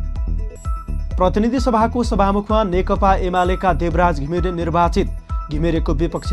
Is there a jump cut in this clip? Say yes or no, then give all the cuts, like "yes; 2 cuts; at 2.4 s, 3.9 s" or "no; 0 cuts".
yes; 1 cut; at 1.0 s